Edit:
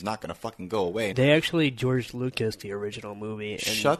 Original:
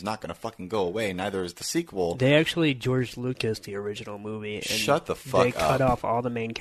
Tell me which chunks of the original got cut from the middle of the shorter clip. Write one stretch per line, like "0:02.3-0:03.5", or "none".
0:01.1-0:02.2